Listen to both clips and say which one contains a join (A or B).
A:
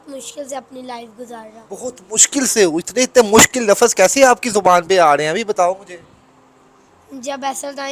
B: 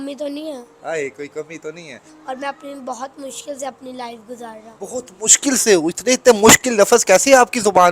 B